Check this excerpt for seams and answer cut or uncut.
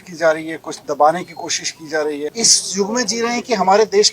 cut